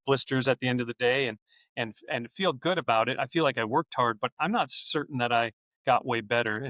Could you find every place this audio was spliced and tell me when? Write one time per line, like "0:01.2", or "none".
0:05.7